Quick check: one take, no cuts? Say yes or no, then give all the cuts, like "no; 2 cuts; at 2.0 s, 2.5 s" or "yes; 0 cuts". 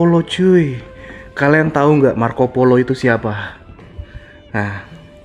yes; 0 cuts